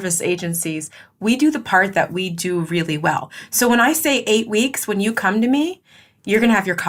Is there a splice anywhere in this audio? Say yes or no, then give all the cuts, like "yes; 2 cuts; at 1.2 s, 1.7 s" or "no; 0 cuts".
no; 0 cuts